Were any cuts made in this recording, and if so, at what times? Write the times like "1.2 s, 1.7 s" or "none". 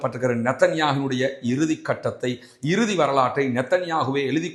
none

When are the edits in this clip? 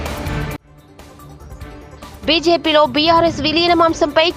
2.0 s

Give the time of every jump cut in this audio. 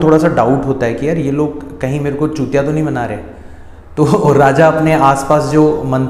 none

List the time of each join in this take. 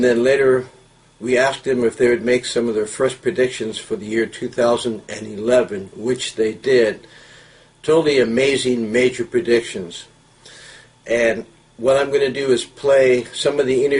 none

